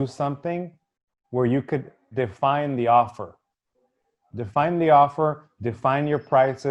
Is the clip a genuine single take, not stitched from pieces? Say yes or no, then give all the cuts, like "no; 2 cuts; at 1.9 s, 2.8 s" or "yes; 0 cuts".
yes; 0 cuts